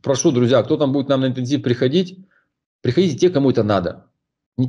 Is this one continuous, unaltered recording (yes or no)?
yes